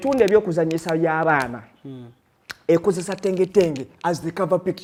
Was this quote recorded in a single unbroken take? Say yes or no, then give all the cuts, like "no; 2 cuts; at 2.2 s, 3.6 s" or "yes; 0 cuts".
yes; 0 cuts